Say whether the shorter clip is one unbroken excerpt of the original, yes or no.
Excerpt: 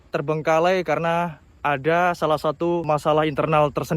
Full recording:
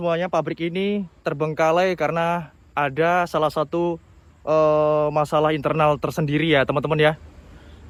no